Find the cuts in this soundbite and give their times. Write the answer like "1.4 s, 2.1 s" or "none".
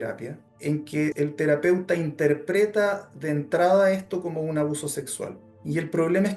1.0 s, 5.5 s